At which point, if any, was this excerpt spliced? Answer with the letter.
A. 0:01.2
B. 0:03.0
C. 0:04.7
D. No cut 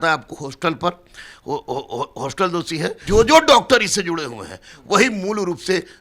B